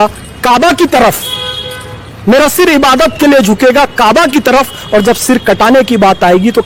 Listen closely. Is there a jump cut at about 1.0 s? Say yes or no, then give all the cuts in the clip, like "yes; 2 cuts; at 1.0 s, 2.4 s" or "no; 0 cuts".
no; 0 cuts